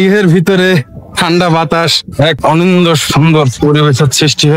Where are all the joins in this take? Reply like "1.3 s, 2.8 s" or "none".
2.3 s, 3.5 s